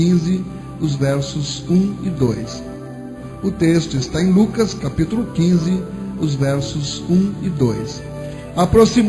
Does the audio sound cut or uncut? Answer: cut